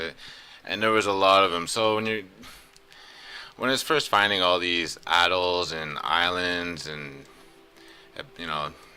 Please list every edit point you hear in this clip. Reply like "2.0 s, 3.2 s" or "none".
none

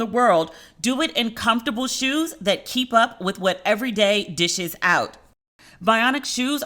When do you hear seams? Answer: none

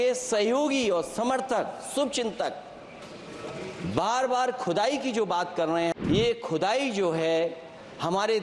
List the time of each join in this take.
6.0 s

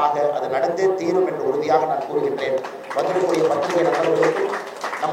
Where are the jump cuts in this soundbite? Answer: none

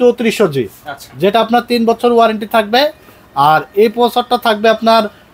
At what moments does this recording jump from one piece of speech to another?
none

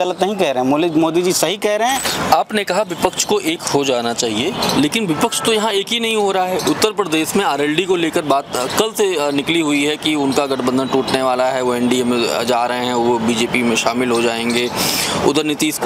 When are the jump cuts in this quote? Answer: 2.1 s

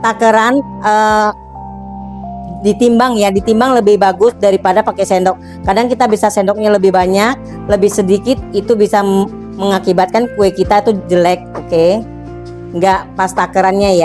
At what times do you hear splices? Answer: none

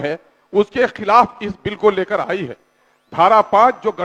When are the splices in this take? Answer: none

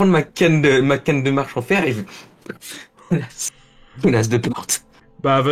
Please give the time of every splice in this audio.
none

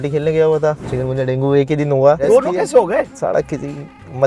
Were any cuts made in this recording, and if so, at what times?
0.9 s, 2.2 s, 3.1 s

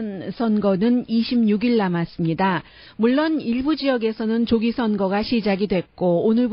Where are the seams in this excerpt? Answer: 3.0 s

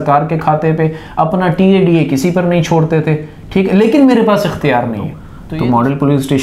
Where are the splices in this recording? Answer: 5.0 s

